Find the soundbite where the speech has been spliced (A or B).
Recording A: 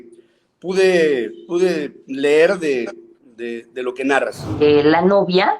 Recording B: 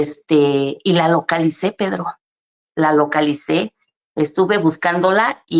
A